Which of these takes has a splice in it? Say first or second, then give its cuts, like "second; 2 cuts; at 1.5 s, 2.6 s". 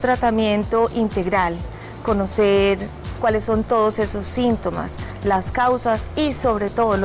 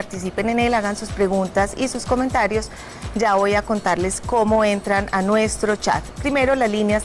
first; 1 cut; at 3.0 s